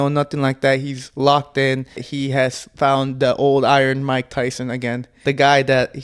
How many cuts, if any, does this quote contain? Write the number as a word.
two